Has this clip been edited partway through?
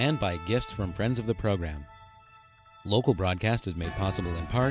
no; 0 cuts

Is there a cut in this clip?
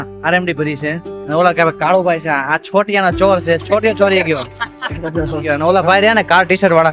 yes; 2 cuts; at 1.1 s, 5.4 s

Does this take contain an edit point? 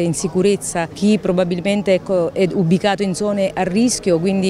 yes; 1 cut; at 0.9 s

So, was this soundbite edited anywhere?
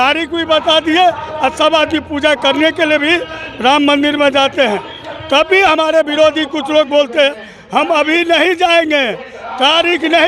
no; 0 cuts

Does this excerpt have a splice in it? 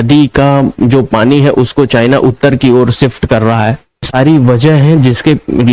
yes; 1 cut; at 4.1 s

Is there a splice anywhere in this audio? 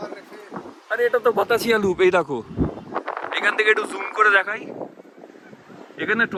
no; 0 cuts

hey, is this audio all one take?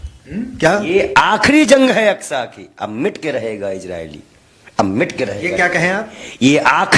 yes; 0 cuts

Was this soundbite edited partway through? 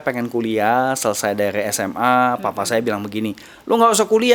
no; 0 cuts

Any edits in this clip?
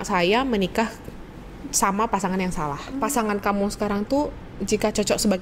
yes; 1 cut; at 2.8 s

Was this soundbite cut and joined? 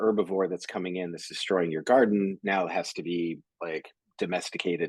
no; 0 cuts

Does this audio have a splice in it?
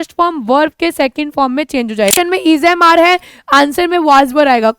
yes; 1 cut; at 2.1 s

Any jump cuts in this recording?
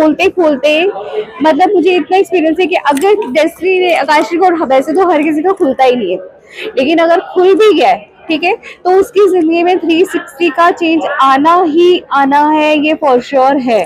no; 0 cuts

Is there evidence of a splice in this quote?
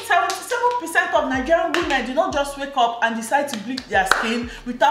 no; 0 cuts

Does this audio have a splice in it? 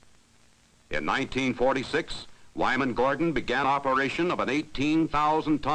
yes; 1 cut; at 3.9 s

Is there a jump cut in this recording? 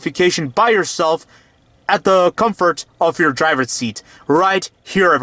no; 0 cuts

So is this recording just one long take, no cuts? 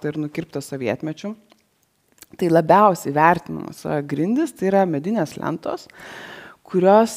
no; 1 cut; at 3.6 s

